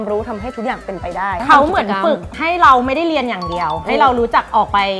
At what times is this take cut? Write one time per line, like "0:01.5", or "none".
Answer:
0:01.4

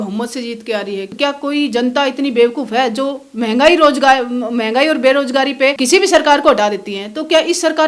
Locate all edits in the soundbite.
0:01.1
0:05.8

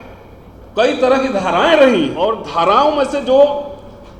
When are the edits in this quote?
0:02.2

